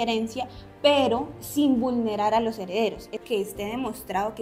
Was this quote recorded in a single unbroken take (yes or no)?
no